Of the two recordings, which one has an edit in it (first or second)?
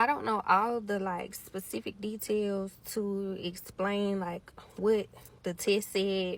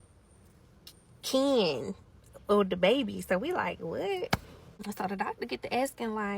second